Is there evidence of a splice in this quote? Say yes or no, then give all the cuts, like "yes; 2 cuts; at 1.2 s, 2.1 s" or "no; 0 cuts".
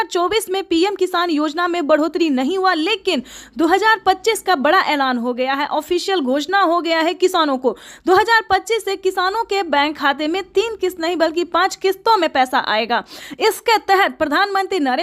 no; 0 cuts